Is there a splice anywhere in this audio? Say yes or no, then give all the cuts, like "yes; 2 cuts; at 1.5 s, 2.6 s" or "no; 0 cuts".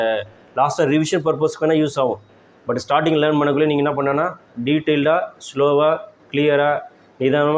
no; 0 cuts